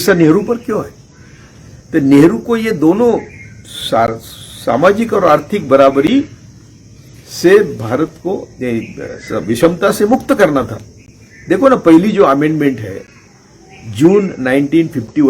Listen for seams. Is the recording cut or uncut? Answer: uncut